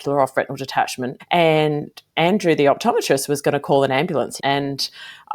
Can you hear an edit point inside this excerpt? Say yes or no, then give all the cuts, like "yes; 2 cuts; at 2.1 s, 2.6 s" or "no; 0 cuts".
yes; 2 cuts; at 1.1 s, 4.4 s